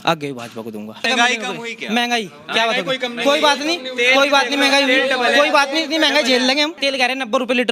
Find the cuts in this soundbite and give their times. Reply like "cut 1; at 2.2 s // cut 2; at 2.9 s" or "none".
cut 1; at 1.1 s // cut 2; at 6.8 s